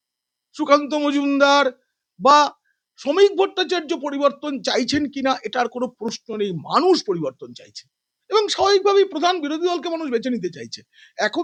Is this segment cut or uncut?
uncut